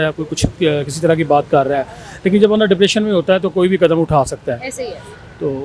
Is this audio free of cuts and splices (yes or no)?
yes